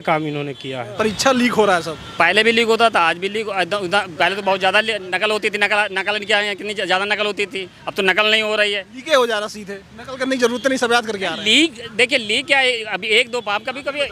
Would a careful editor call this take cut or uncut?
cut